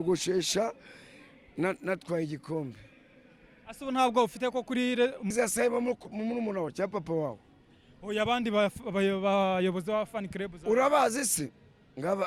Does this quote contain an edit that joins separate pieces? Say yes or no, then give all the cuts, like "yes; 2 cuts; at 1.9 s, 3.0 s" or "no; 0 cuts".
yes; 1 cut; at 5.3 s